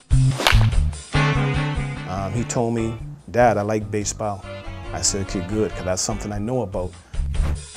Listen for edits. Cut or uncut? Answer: cut